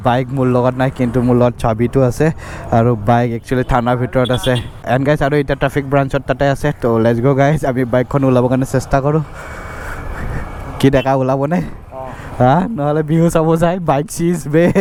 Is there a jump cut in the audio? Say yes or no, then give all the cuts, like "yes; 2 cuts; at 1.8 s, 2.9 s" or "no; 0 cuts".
no; 0 cuts